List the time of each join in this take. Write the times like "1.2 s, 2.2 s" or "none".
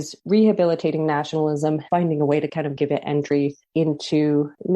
1.9 s